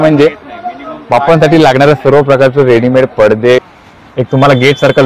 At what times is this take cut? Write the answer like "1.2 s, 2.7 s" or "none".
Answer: 3.7 s